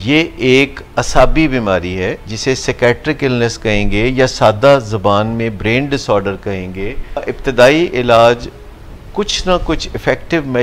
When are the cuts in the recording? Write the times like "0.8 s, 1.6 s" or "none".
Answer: 7.2 s